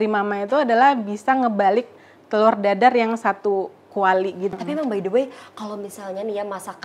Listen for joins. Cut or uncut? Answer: uncut